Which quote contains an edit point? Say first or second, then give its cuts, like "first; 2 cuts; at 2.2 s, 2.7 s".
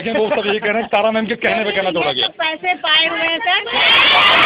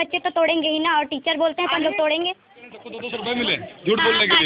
second; 1 cut; at 3.1 s